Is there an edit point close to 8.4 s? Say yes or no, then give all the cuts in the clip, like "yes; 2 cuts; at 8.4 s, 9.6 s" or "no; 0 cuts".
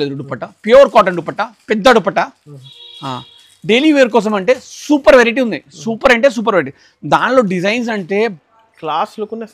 yes; 1 cut; at 8.4 s